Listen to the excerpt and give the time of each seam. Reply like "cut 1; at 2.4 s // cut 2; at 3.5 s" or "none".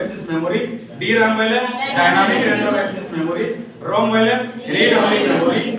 none